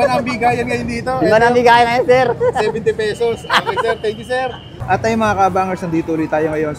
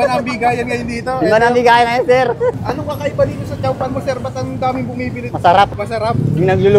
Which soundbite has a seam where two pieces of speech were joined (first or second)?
second